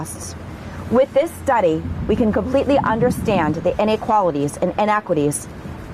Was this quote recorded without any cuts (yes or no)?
yes